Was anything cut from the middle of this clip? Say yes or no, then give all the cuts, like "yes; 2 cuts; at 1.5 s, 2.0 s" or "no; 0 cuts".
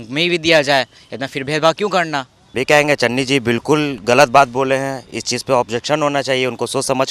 yes; 1 cut; at 2.4 s